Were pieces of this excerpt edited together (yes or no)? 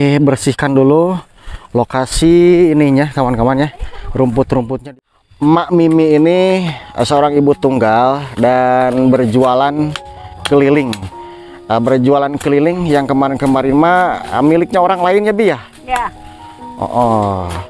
yes